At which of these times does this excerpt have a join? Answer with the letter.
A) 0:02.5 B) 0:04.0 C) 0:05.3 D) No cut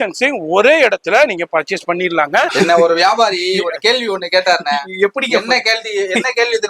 A